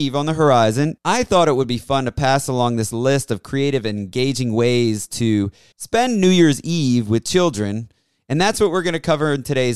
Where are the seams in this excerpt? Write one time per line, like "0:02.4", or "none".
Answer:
0:00.9